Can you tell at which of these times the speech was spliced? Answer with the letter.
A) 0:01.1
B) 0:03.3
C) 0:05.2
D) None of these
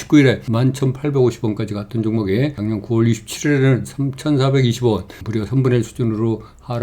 C